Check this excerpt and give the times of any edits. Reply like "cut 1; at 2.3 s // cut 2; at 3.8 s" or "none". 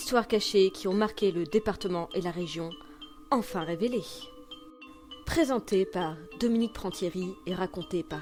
none